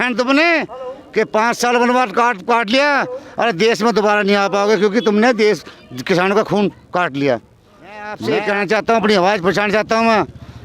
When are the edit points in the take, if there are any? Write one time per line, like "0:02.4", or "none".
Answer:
0:08.1